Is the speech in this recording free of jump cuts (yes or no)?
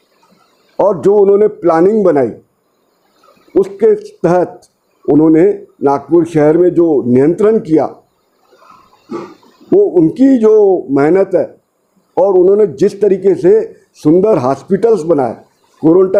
yes